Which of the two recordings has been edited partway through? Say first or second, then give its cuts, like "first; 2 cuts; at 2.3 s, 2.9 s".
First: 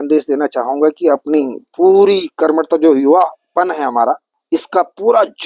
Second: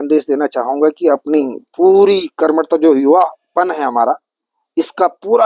first; 1 cut; at 4.3 s